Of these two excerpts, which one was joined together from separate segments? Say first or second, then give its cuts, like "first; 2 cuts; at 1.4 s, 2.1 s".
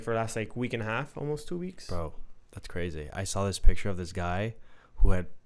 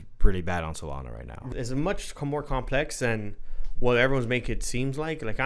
second; 1 cut; at 1.5 s